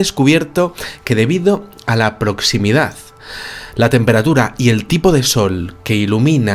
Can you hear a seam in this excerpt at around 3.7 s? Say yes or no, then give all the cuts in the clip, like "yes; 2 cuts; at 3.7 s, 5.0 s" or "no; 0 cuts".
no; 1 cut; at 5.5 s